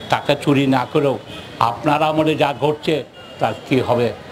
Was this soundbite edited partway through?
no; 0 cuts

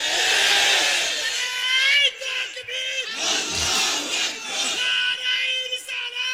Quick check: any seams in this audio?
no; 0 cuts

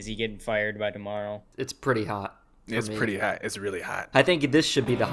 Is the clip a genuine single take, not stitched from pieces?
no; 2 cuts; at 1.5 s, 4.1 s

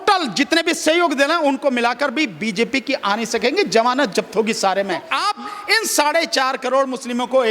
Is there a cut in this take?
yes; 1 cut; at 5.1 s

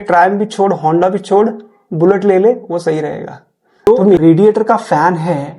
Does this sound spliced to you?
yes; 1 cut; at 4.0 s

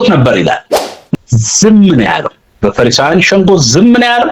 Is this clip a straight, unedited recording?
no; 1 cut; at 1.1 s

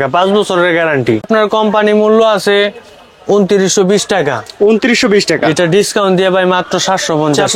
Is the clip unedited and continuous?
no; 1 cut; at 1.3 s

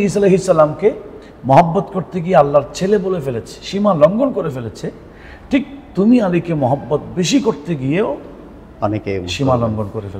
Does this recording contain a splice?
no; 0 cuts

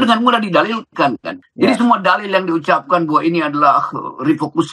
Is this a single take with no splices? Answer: no; 1 cut; at 1.4 s

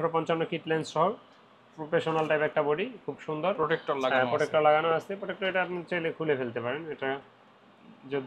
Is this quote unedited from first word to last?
yes; 0 cuts

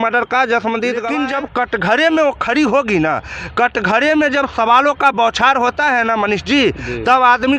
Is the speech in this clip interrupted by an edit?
yes; 1 cut; at 1.1 s

